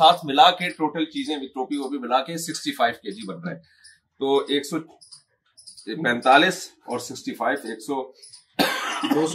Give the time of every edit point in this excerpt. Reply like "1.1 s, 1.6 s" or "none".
none